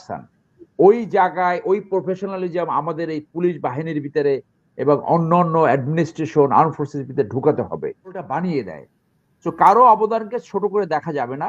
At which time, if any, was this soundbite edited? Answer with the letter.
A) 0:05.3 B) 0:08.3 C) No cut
B